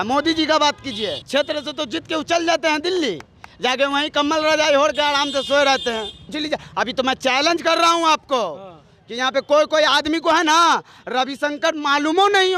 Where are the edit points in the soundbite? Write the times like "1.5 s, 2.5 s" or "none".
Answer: 1.2 s, 6.3 s